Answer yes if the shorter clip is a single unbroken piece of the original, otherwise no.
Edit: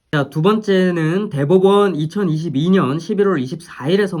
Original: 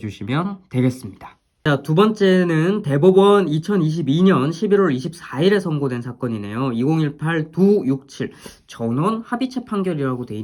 yes